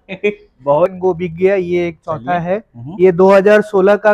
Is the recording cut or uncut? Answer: cut